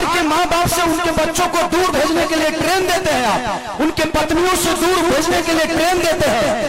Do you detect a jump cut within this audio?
no; 0 cuts

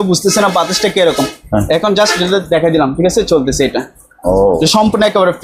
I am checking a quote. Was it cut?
no; 0 cuts

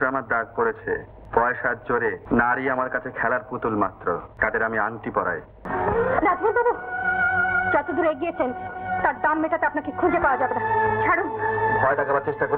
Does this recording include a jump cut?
yes; 4 cuts; at 1.2 s, 2.2 s, 4.3 s, 5.6 s

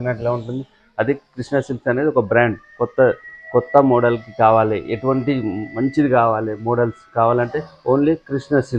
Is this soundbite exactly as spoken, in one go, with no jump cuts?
yes; 0 cuts

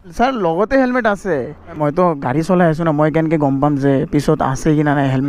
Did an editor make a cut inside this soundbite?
yes; 1 cut; at 1.8 s

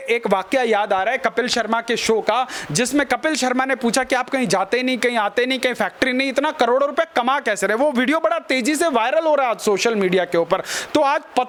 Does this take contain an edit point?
no; 0 cuts

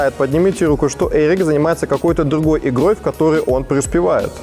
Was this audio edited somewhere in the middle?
no; 0 cuts

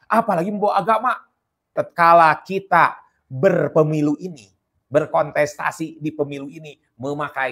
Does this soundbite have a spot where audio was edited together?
yes; 1 cut; at 1.7 s

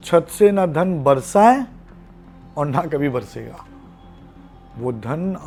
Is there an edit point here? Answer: no; 0 cuts

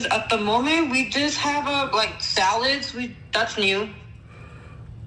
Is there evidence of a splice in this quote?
no; 0 cuts

